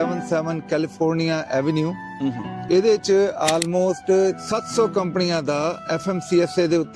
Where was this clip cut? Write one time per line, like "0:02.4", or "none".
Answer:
0:02.6
0:04.4
0:05.8